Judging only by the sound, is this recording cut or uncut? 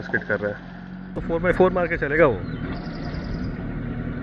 cut